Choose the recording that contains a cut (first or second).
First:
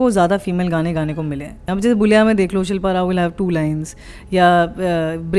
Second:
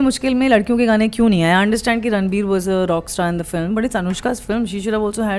first